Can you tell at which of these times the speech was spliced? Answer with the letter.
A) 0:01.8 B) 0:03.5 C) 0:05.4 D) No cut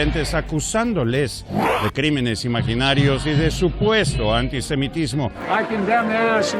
C